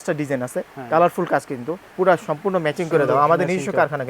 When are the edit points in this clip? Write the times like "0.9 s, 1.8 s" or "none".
1.8 s